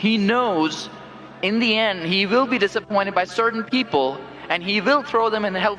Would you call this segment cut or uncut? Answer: uncut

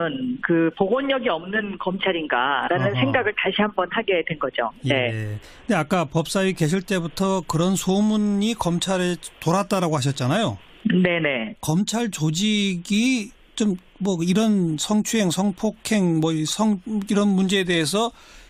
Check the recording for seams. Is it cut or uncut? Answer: uncut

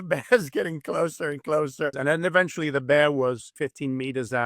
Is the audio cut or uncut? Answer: cut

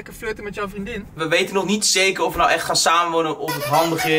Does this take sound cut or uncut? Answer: cut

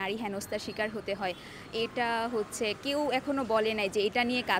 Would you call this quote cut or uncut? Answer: uncut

